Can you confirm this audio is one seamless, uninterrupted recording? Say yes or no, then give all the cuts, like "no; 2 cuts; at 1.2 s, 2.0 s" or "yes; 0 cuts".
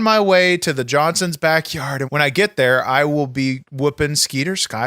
no; 1 cut; at 2.0 s